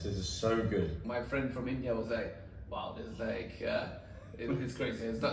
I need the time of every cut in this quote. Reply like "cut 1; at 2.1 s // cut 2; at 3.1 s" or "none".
cut 1; at 1.0 s